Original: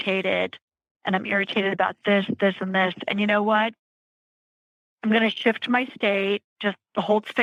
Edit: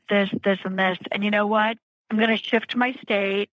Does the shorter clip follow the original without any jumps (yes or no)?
no